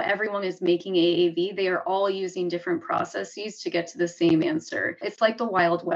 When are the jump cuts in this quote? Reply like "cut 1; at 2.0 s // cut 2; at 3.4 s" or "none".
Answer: cut 1; at 5.0 s